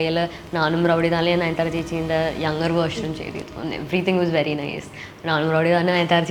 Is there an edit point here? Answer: no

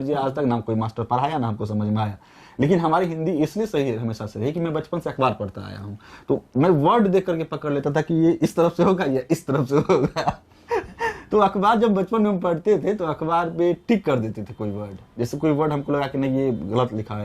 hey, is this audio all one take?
yes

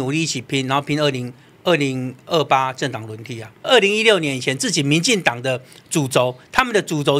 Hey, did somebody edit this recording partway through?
yes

